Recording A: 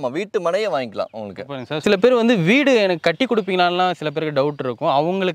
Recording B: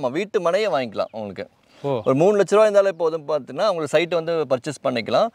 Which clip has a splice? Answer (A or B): A